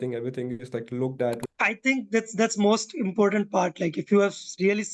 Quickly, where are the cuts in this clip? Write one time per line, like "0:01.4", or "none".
0:01.5